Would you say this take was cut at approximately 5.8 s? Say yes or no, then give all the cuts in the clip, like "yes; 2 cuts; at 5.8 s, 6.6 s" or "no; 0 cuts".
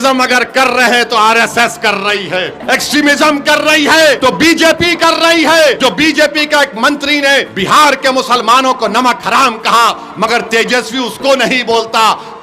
yes; 4 cuts; at 2.6 s, 4.2 s, 5.8 s, 7.5 s